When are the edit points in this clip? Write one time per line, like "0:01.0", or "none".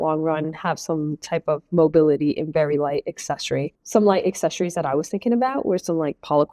0:03.8